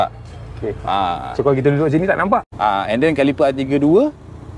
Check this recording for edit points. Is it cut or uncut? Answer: cut